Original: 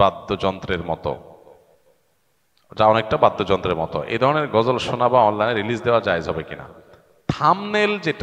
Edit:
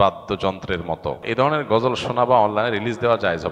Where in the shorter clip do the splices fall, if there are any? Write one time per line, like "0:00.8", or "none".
0:01.2